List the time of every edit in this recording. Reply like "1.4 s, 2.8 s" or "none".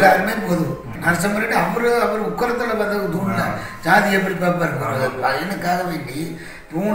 0.9 s